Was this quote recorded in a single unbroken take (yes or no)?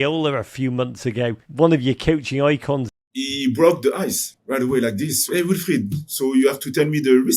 no